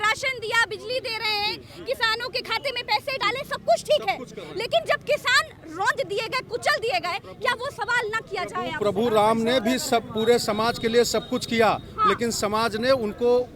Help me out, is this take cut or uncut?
uncut